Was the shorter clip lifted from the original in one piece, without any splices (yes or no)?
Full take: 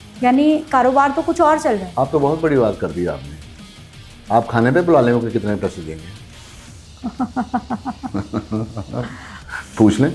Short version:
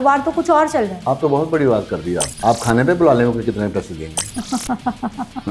no